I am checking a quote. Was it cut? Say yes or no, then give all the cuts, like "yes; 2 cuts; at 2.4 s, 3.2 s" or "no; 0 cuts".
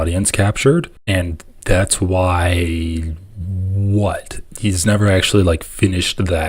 yes; 1 cut; at 1.0 s